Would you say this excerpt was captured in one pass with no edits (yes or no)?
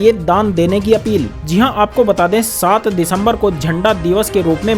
yes